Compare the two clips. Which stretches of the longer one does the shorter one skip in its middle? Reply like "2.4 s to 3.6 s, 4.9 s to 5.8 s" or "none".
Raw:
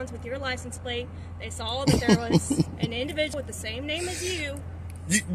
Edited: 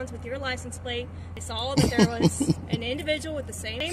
1.3 s to 1.4 s